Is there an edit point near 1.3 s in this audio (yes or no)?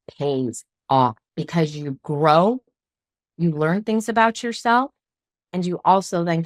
yes